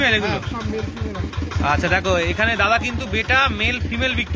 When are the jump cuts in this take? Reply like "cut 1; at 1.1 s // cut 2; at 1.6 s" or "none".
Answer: none